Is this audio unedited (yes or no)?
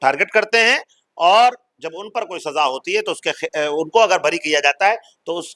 yes